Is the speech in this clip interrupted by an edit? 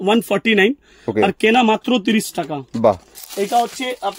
yes; 1 cut; at 3.1 s

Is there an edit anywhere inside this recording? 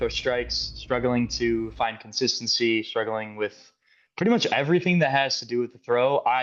no; 0 cuts

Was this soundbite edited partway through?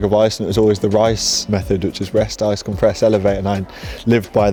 no; 0 cuts

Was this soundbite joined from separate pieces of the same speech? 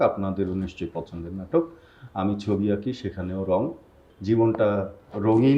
yes; 1 cut; at 4.1 s

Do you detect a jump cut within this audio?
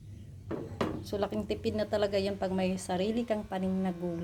no; 0 cuts

